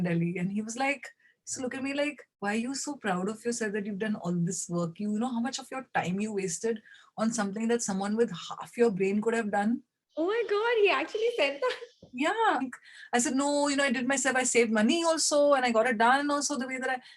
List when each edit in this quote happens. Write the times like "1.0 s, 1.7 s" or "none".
12.6 s